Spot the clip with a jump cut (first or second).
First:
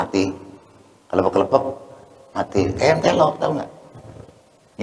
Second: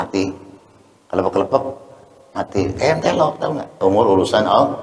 second